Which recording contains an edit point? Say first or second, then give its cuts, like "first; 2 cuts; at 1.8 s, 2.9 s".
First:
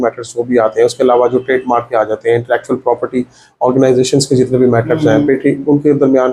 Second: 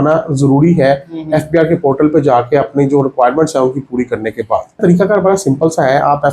second; 1 cut; at 4.8 s